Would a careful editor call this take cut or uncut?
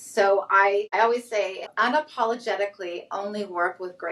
cut